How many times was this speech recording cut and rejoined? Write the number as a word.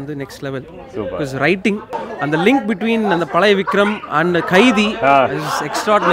one